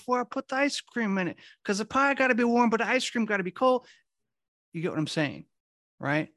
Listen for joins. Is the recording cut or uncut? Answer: uncut